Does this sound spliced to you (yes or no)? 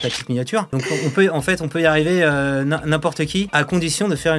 yes